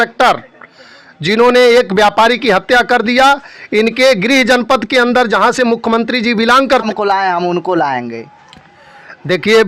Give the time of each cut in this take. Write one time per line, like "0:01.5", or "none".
0:06.8